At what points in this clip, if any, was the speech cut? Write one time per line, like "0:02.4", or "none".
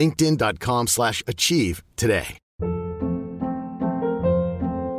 0:02.4

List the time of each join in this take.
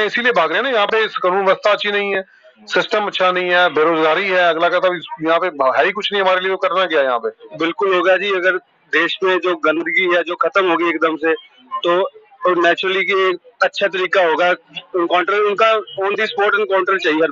0:07.4

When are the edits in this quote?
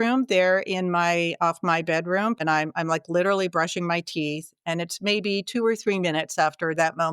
0:02.4

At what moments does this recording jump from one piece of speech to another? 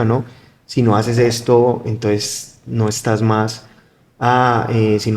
none

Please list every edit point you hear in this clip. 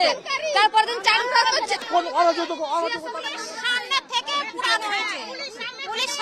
0:01.8

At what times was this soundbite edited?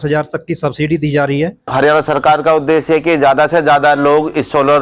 0:01.7

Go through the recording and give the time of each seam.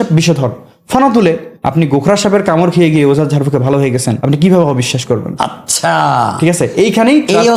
0:01.5
0:04.1
0:05.3

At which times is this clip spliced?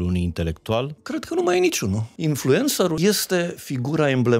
0:01.0
0:02.1
0:03.0

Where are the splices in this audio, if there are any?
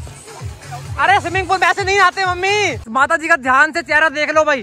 0:02.8

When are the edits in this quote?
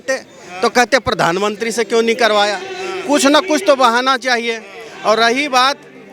none

